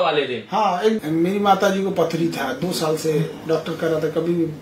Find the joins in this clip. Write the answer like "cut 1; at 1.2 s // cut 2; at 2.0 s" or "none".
cut 1; at 1.0 s